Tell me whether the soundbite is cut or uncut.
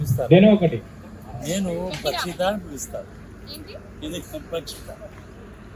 uncut